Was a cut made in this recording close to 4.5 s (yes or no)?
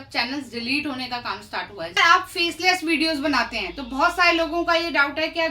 no